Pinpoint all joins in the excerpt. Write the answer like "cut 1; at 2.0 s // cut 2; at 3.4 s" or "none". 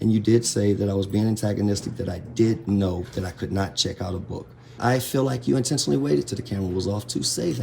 cut 1; at 4.8 s